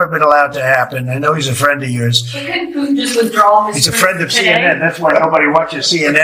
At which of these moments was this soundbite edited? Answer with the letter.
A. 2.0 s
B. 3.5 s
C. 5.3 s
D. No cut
D